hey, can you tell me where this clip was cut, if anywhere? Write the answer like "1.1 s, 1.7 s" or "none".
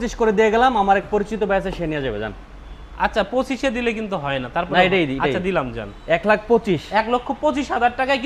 none